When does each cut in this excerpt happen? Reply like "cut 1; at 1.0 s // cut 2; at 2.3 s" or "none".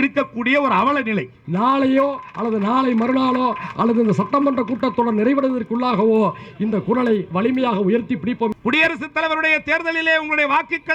cut 1; at 1.4 s // cut 2; at 8.5 s